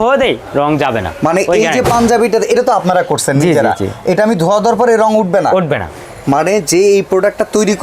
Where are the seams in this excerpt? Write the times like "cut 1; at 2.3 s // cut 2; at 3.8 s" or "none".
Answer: none